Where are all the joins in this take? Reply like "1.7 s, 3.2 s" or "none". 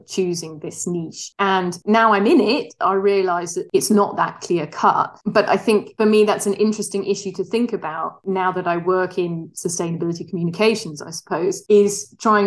none